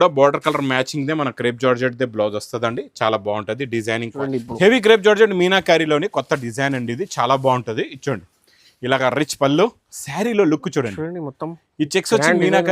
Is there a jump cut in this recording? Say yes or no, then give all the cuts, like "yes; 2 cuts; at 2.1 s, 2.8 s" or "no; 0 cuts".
yes; 1 cut; at 4.2 s